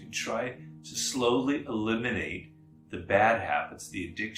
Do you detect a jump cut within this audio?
no; 0 cuts

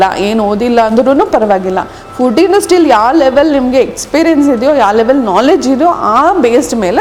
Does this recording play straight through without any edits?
yes; 0 cuts

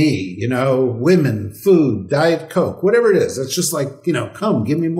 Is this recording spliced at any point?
no; 0 cuts

